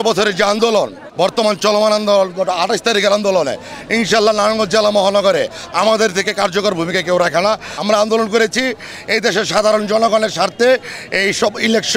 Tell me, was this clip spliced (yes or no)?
yes